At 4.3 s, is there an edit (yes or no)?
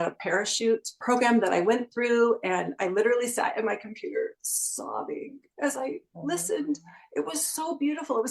no